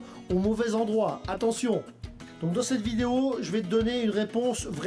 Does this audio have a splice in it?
no; 0 cuts

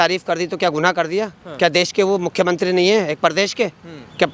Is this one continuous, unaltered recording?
yes; 0 cuts

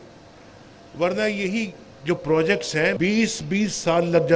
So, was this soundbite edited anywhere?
yes; 1 cut; at 3.0 s

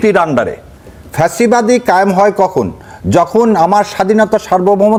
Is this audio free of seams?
yes; 0 cuts

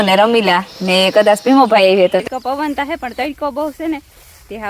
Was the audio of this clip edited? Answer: yes; 1 cut; at 2.2 s

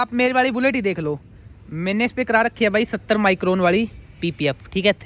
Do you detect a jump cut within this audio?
no; 0 cuts

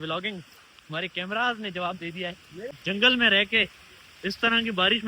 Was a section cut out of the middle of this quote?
yes; 1 cut; at 2.5 s

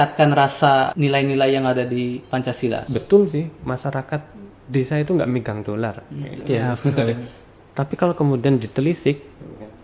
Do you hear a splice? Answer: yes; 2 cuts; at 0.9 s, 2.8 s

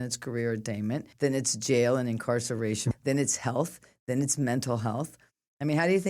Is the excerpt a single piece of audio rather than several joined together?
no; 2 cuts; at 1.1 s, 2.8 s

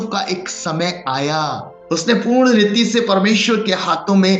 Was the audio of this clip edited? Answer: yes; 1 cut; at 1.7 s

